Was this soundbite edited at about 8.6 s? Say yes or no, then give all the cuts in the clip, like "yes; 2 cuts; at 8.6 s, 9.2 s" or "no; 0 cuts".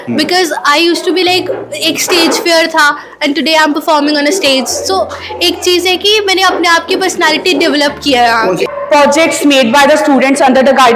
yes; 1 cut; at 8.6 s